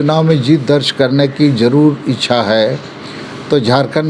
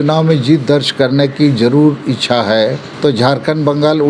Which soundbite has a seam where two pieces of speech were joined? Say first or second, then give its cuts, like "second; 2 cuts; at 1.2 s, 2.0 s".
second; 1 cut; at 2.9 s